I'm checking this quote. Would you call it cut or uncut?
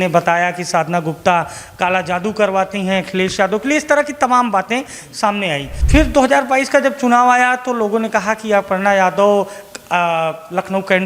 cut